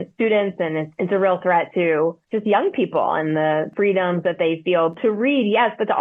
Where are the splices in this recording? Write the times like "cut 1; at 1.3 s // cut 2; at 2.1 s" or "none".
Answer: none